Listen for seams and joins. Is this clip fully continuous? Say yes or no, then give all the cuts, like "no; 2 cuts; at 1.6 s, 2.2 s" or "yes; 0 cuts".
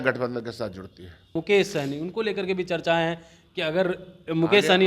no; 1 cut; at 1.4 s